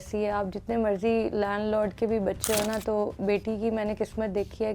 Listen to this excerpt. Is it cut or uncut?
uncut